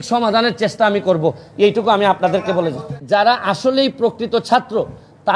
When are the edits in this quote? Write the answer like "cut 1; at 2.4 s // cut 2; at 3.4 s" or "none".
cut 1; at 3.0 s